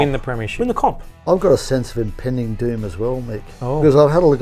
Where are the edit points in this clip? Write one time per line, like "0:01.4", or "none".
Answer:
0:01.1